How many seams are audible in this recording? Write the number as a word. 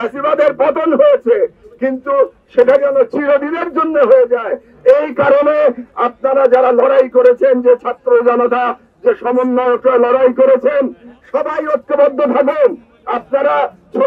zero